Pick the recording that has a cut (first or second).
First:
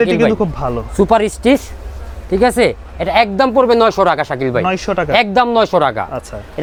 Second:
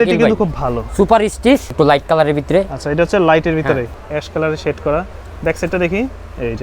second